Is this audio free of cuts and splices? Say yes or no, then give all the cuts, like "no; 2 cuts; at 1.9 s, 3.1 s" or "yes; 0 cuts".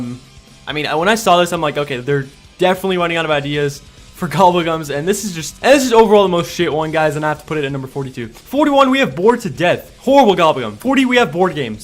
no; 1 cut; at 5.5 s